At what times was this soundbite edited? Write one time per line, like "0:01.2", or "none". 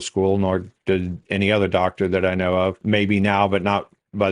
0:02.8